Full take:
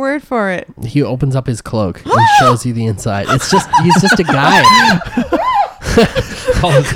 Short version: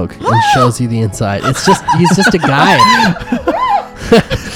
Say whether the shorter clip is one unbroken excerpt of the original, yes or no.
yes